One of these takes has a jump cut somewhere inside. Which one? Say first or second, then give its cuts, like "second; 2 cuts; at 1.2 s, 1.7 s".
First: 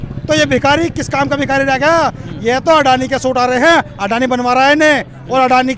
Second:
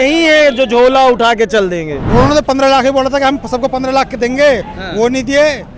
second; 1 cut; at 1.9 s